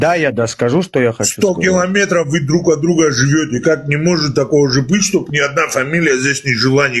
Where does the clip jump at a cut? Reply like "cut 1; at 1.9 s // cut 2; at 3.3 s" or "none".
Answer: none